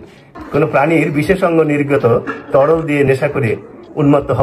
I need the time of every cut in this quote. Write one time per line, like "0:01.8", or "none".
none